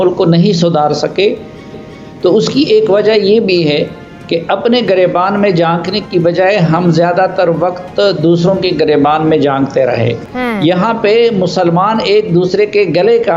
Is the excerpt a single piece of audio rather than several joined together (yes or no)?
no